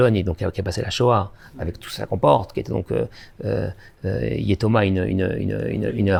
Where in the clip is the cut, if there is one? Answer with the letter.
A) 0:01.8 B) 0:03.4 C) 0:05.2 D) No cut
D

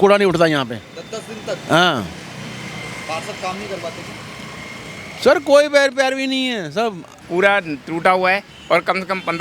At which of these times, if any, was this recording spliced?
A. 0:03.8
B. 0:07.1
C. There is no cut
B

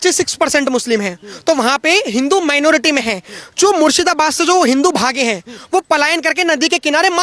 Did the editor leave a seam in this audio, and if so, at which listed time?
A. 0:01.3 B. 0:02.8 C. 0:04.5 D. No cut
D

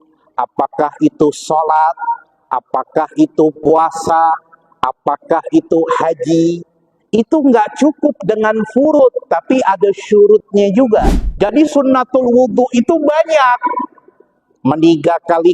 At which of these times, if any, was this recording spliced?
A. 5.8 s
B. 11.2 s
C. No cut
B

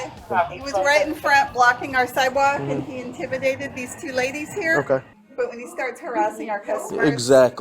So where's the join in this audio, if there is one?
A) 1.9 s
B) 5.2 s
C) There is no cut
B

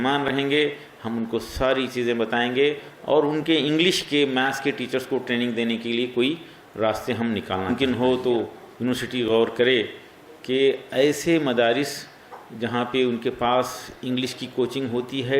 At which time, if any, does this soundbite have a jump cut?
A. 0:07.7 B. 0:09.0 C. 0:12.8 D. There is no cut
A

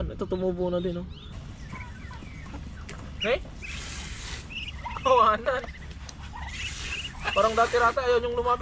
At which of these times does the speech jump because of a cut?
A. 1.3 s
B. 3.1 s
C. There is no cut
A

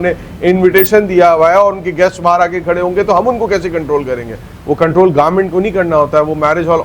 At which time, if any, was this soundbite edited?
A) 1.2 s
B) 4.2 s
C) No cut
C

